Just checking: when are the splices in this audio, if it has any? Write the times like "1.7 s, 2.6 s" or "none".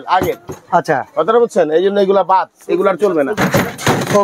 none